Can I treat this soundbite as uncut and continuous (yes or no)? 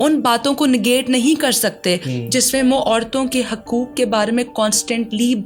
yes